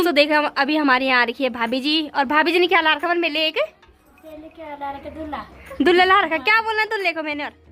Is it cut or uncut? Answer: uncut